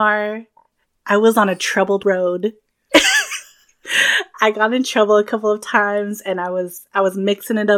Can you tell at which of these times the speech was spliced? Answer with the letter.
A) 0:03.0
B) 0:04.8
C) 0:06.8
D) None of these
D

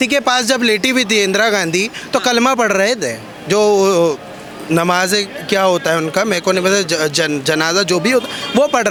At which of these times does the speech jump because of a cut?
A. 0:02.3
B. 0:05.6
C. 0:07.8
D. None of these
D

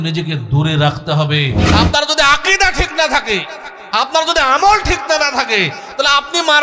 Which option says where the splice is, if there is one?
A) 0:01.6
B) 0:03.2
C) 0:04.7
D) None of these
A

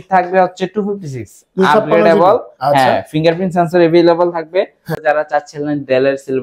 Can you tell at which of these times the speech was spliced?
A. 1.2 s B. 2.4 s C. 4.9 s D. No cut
C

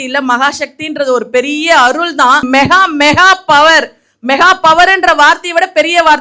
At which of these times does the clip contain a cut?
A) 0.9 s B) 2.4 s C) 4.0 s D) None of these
B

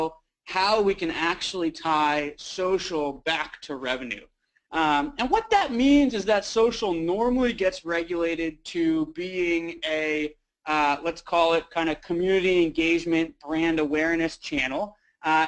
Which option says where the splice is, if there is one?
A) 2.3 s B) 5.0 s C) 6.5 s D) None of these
B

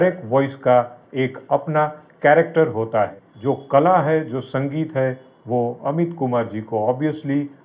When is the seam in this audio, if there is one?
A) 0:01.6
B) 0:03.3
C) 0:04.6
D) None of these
B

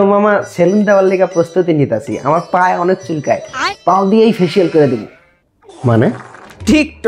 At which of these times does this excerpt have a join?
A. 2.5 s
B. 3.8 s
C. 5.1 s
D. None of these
D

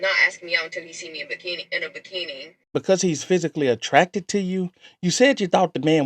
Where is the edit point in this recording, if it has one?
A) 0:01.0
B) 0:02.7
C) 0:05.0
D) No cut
B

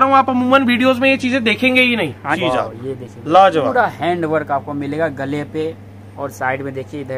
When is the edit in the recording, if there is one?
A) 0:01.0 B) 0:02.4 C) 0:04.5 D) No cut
B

